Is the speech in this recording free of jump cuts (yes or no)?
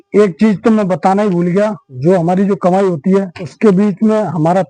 no